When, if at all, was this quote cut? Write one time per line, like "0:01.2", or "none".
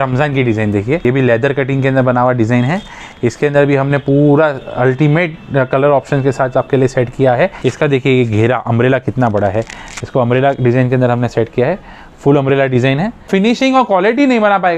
0:01.0
0:07.6
0:13.3